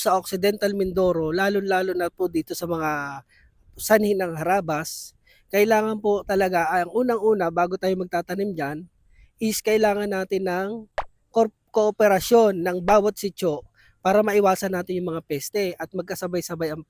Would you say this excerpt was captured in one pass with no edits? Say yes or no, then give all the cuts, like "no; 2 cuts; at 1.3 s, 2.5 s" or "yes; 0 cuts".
yes; 0 cuts